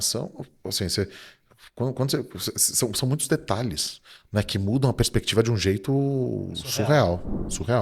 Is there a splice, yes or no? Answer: no